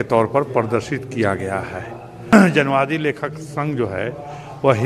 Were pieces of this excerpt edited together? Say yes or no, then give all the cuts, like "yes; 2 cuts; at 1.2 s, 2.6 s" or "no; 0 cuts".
yes; 1 cut; at 2.3 s